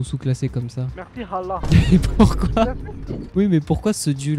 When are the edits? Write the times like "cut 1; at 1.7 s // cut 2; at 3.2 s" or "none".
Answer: none

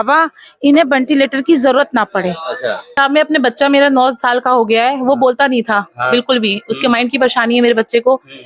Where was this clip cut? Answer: cut 1; at 3.0 s

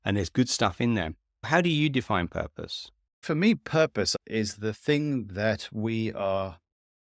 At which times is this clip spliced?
cut 1; at 1.3 s // cut 2; at 3.2 s // cut 3; at 4.2 s

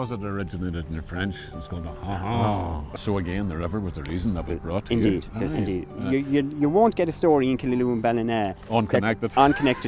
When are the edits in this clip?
cut 1; at 2.9 s

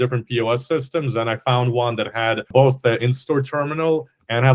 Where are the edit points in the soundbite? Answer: cut 1; at 2.5 s

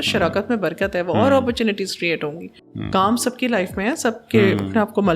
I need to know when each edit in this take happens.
cut 1; at 2.5 s

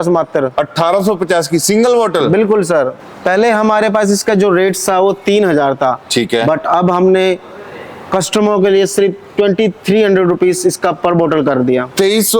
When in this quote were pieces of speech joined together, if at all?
cut 1; at 3.0 s

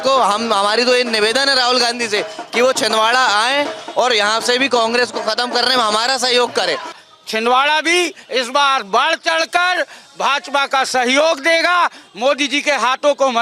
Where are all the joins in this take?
cut 1; at 7.0 s

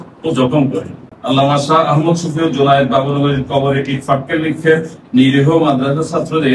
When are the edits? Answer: cut 1; at 1.1 s

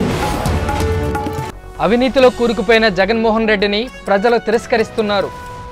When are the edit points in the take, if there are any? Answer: cut 1; at 1.5 s

